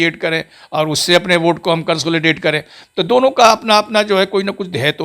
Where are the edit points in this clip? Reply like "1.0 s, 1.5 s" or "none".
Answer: none